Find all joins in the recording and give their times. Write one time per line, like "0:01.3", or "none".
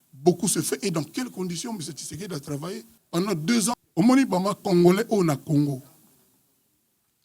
0:02.9
0:03.7